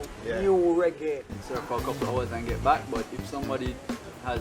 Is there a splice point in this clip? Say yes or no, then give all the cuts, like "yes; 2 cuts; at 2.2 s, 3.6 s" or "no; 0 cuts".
yes; 1 cut; at 1.3 s